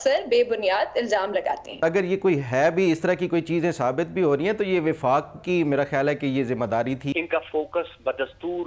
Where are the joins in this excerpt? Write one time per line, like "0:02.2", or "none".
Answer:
0:01.8
0:07.1